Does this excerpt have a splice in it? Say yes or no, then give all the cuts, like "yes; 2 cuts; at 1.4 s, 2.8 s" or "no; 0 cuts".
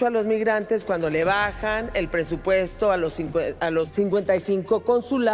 yes; 1 cut; at 3.9 s